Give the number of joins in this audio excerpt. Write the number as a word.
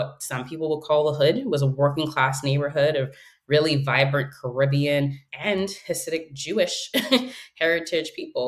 one